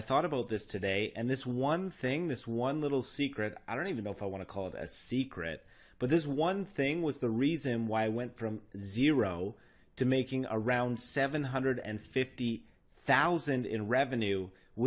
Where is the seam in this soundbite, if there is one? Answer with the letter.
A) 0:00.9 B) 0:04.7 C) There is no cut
C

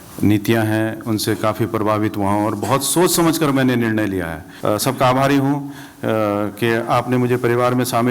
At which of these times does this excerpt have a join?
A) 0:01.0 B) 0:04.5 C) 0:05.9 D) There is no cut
B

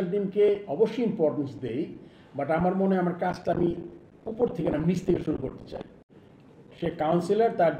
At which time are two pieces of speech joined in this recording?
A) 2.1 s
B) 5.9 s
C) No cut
B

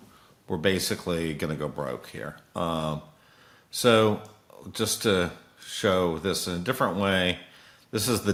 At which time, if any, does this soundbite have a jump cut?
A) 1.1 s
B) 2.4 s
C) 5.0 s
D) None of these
D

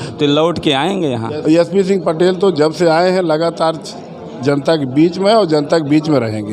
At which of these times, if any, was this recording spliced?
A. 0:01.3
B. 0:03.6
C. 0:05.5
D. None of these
A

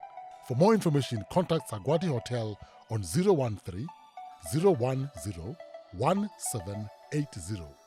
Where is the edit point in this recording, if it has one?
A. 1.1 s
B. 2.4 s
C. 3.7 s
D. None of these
D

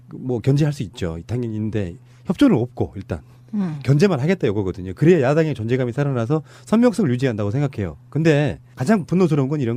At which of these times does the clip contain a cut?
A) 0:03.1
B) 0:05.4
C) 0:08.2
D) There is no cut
A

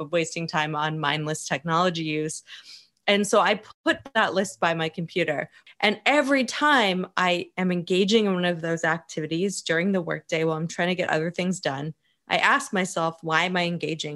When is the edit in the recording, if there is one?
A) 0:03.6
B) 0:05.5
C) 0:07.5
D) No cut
B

